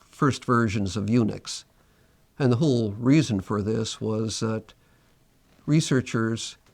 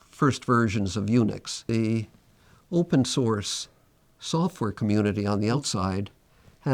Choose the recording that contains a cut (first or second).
second